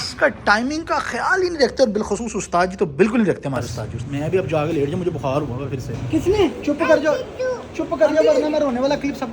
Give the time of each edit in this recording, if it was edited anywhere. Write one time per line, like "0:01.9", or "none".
0:03.7
0:06.1